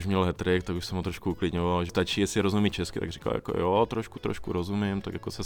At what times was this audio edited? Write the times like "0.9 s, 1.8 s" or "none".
1.9 s